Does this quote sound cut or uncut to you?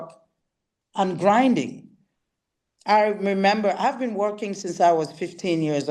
uncut